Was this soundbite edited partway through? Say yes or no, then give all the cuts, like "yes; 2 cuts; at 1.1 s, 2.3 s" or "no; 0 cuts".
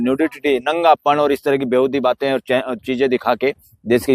no; 0 cuts